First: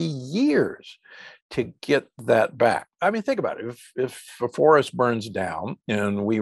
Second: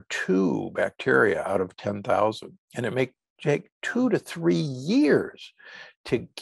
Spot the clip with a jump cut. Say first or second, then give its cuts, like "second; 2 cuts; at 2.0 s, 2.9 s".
first; 1 cut; at 3.0 s